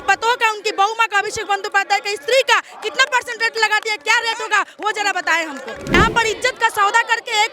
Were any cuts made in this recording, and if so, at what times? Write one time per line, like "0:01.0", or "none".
0:06.0